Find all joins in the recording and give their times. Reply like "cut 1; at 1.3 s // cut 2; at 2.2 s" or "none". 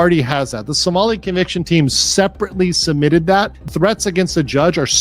cut 1; at 3.6 s